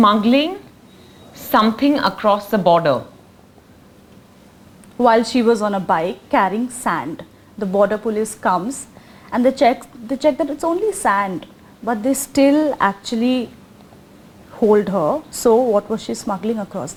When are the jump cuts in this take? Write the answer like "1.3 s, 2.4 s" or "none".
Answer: none

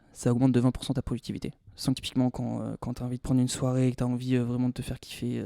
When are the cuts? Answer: 2.0 s

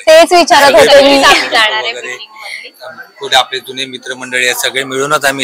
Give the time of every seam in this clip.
none

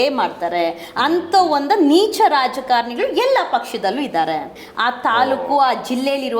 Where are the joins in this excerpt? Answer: 4.6 s

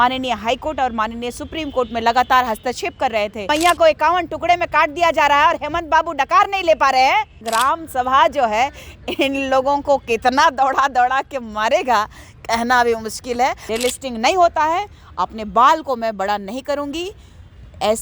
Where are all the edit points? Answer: 3.5 s, 7.4 s, 13.6 s

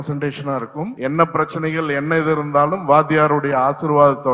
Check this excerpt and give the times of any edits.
0.9 s

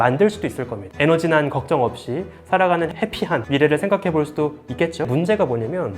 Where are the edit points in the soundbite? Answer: 0.9 s, 2.9 s, 5.1 s

